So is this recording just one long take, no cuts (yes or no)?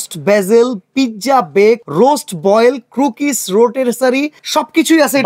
no